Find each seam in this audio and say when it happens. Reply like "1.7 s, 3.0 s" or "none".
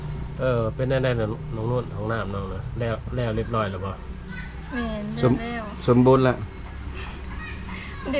none

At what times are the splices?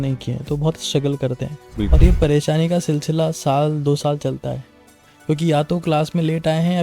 1.9 s

